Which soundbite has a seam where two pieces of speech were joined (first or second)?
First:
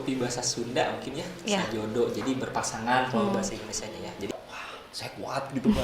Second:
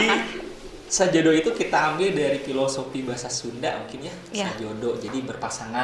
first